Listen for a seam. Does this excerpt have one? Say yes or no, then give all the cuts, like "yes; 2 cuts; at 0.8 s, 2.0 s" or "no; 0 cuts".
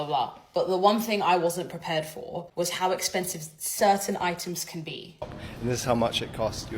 yes; 1 cut; at 5.4 s